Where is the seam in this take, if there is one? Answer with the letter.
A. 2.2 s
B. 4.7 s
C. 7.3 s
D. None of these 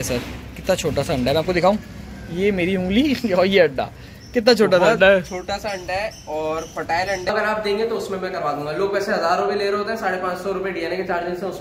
C